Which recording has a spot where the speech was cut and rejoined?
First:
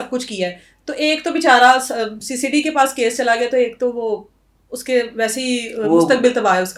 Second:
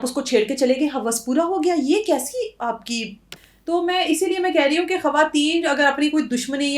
second; 1 cut; at 3.4 s

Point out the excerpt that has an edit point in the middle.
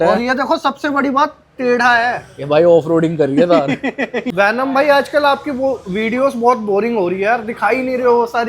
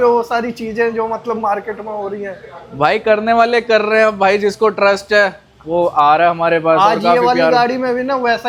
first; 1 cut; at 4.2 s

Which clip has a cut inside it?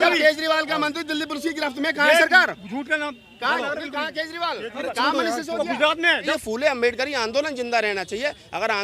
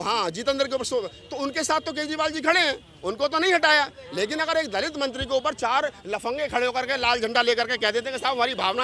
first; 1 cut; at 6.3 s

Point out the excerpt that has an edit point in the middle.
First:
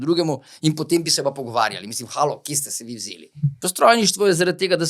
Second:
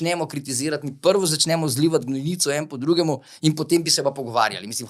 first; 1 cut; at 3.6 s

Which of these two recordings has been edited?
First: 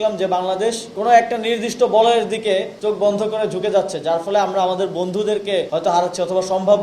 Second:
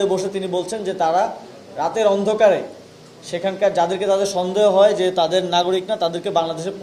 first; 3 cuts; at 0.9 s, 2.7 s, 5.7 s

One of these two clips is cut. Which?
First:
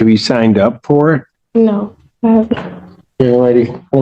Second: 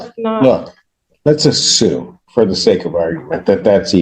first; 1 cut; at 1.4 s

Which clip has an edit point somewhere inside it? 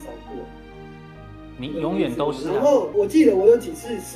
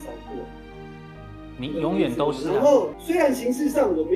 second; 1 cut; at 2.9 s

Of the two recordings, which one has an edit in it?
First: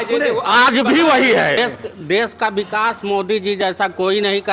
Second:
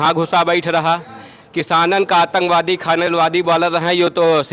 first; 1 cut; at 1.6 s

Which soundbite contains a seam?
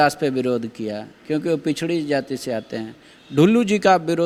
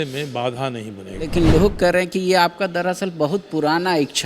second; 1 cut; at 1.3 s

